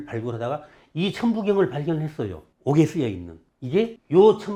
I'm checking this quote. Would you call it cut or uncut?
uncut